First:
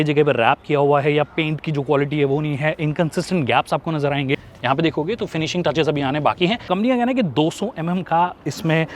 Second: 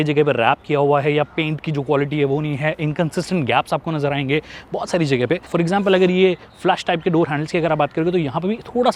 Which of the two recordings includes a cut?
first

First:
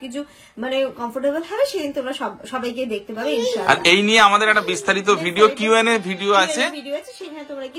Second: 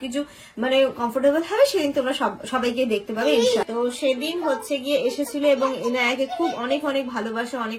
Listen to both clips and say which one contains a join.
second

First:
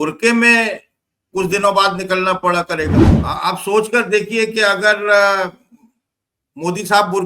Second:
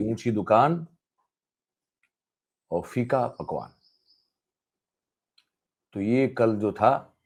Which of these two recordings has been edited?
first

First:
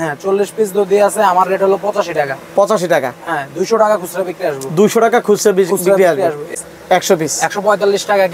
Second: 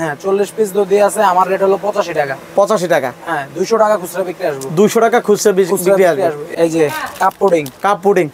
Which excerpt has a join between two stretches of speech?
first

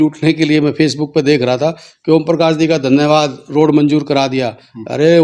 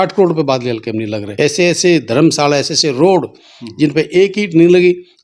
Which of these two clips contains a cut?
second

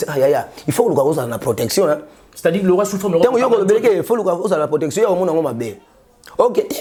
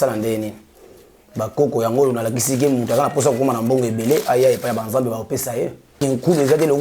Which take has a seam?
second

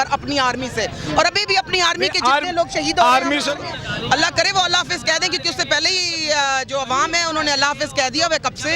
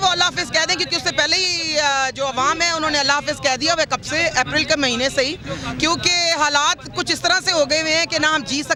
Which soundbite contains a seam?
first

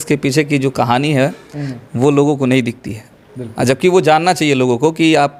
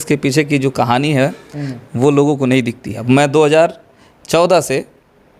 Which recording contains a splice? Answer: second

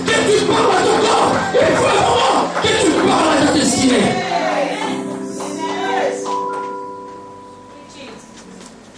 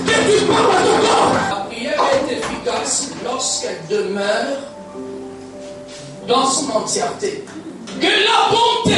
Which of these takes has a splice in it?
second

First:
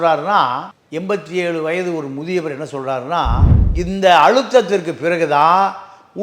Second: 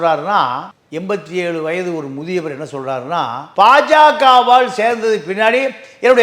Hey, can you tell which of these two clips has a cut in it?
first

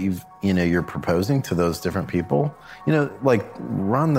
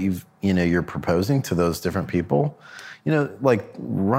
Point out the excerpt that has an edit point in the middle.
first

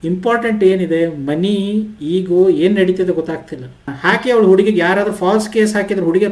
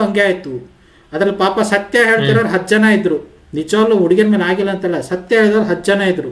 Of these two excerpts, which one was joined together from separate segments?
first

